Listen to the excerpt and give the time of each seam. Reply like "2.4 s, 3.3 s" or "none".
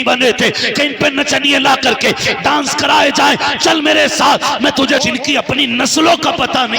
5.0 s